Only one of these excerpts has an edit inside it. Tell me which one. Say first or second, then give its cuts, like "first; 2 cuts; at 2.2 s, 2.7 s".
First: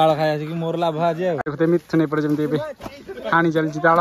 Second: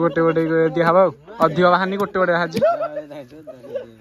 first; 1 cut; at 1.4 s